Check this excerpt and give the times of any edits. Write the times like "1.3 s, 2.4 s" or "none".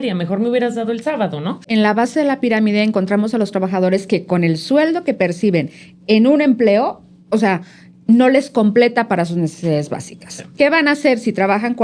1.7 s